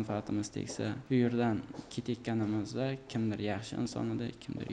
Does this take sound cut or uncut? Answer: cut